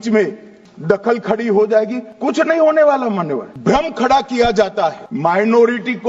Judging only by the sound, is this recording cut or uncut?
cut